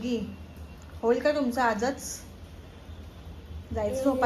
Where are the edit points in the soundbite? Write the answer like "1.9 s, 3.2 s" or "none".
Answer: none